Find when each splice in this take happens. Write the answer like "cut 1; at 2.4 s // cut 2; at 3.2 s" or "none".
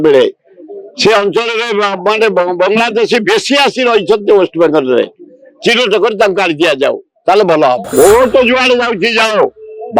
cut 1; at 7.9 s